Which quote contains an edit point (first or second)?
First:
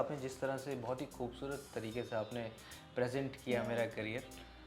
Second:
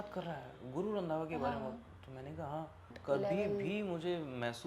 second